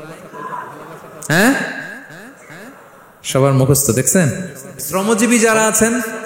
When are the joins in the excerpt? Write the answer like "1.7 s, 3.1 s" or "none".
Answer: 4.9 s